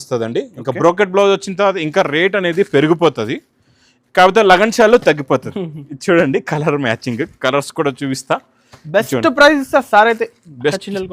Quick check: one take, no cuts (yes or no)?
yes